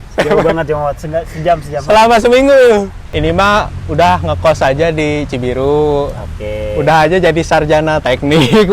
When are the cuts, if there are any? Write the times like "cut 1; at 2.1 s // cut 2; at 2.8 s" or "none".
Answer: cut 1; at 3.0 s